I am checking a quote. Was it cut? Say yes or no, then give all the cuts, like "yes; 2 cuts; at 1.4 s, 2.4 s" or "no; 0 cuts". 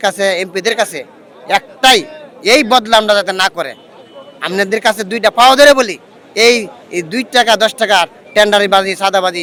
no; 0 cuts